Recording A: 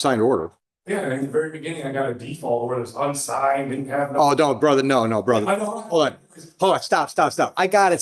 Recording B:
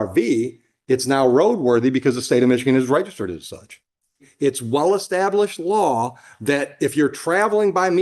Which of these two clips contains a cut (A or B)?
B